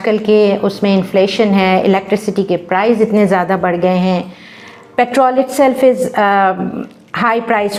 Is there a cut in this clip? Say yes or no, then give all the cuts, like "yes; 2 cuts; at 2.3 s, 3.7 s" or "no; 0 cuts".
no; 0 cuts